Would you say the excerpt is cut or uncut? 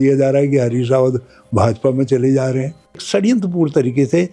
cut